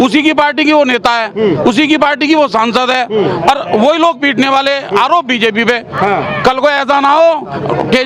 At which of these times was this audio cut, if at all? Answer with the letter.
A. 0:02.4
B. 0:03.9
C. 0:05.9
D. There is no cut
D